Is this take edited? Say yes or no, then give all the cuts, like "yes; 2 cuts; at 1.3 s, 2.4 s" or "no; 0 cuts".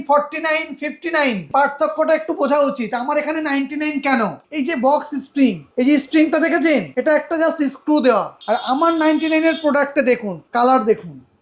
yes; 6 cuts; at 1.5 s, 4.4 s, 5.6 s, 6.9 s, 8.3 s, 10.3 s